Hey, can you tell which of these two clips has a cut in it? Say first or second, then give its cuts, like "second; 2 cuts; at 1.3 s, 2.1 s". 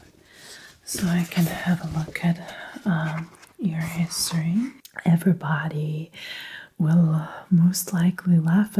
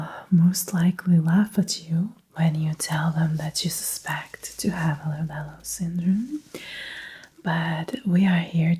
first; 1 cut; at 4.9 s